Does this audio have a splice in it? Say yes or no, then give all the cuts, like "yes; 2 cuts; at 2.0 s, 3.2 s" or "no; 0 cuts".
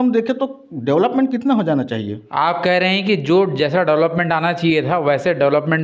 no; 0 cuts